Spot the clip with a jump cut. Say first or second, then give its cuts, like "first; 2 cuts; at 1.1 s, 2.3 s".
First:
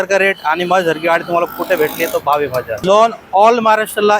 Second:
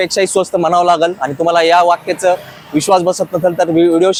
first; 1 cut; at 2.8 s